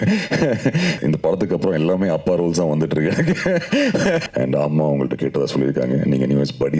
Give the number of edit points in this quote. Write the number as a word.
two